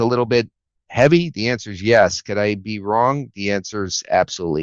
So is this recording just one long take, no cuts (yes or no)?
yes